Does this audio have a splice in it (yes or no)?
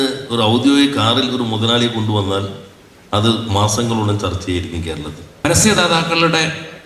yes